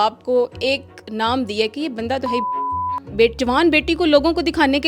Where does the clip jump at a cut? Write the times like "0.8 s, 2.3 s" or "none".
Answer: 3.1 s